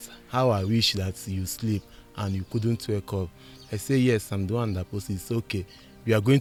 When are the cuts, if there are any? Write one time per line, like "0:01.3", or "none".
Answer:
none